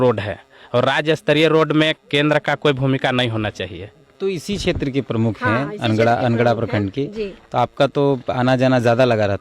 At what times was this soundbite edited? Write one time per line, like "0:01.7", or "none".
0:04.1